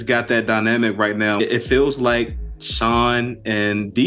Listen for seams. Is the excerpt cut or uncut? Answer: cut